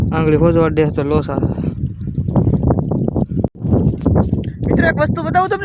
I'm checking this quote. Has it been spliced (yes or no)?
no